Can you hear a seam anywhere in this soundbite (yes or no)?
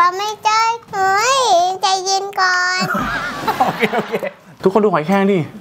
yes